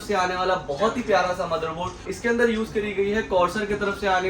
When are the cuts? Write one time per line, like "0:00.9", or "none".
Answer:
0:02.1